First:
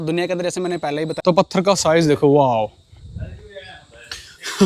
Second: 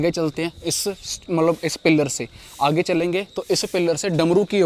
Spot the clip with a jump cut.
first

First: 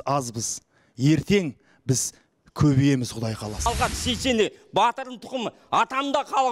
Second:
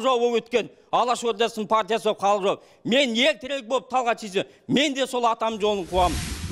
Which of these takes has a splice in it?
first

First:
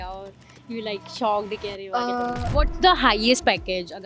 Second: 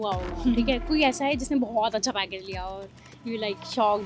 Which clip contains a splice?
first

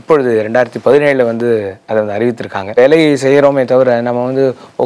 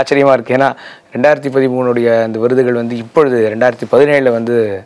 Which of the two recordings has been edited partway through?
first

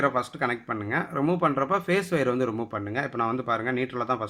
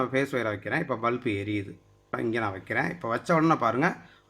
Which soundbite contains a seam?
second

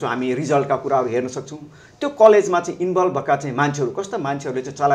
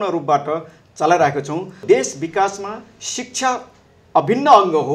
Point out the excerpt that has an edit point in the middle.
second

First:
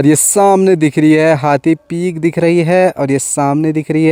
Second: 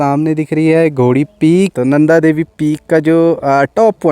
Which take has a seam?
second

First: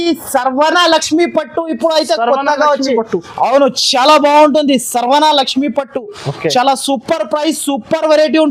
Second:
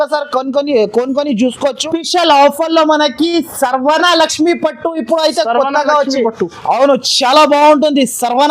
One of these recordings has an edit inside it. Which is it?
second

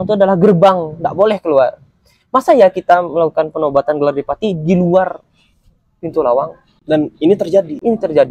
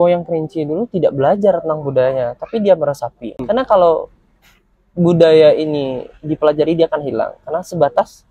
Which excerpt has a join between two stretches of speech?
second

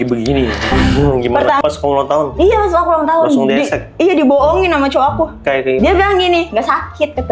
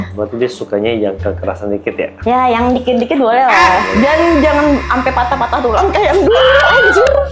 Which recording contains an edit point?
first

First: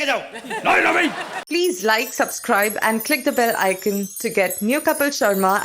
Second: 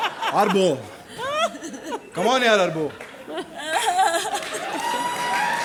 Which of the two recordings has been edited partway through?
first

